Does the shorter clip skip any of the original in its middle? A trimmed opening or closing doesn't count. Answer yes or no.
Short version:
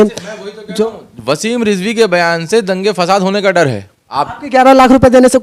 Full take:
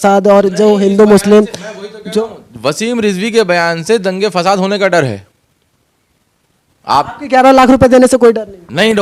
yes